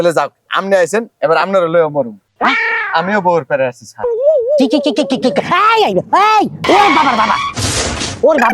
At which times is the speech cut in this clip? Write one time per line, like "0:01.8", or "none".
0:06.6